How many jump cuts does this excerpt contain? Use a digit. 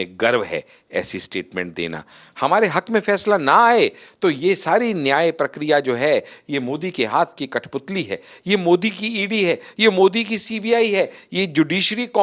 0